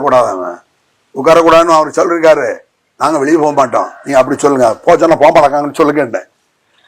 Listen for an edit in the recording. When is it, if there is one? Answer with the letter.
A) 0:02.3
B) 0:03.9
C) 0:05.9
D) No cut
D